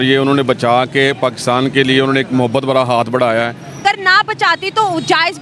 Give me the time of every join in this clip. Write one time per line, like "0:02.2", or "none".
0:03.8